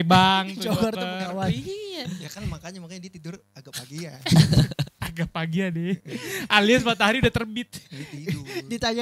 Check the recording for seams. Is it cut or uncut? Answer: uncut